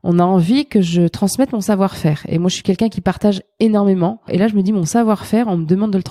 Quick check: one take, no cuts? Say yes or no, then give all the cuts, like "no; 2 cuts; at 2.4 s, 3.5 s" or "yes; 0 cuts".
no; 1 cut; at 4.3 s